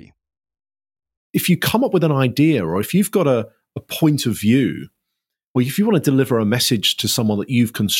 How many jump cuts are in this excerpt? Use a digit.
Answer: 1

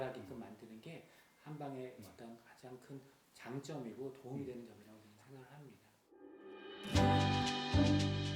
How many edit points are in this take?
1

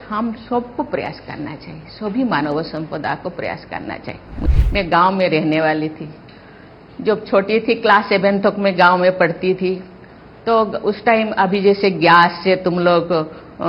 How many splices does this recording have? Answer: 1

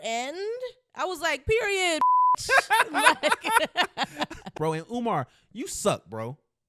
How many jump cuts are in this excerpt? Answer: 1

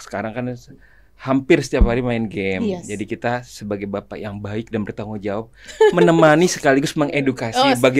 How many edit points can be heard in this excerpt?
0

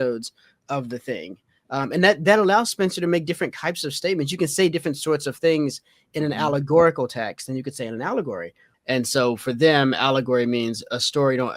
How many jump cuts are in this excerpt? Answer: 1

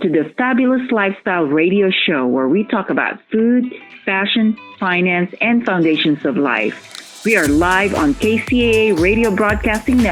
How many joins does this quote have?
0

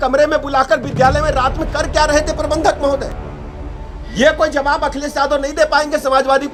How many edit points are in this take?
0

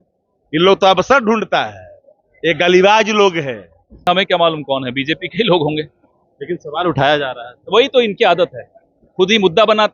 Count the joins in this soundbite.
1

